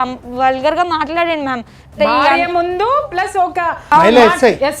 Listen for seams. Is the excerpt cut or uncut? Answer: cut